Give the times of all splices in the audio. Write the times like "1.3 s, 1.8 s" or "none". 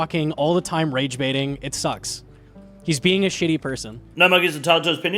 4.0 s

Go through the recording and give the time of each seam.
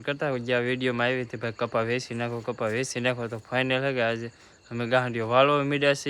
none

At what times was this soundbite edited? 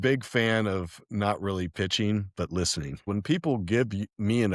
3.1 s

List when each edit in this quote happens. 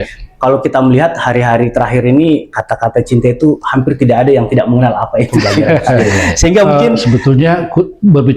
6.9 s

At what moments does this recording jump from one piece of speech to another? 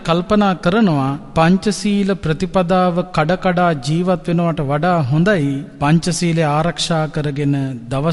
1.2 s, 5.7 s

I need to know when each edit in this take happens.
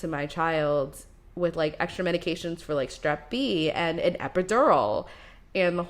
none

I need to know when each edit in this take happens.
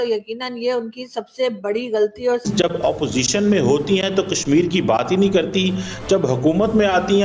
2.4 s

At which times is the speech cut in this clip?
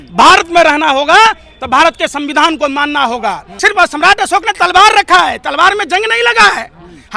3.5 s

